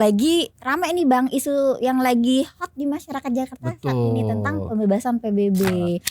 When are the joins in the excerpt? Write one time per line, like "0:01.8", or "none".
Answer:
none